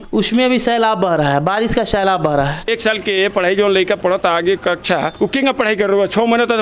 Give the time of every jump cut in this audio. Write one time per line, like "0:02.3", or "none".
0:02.7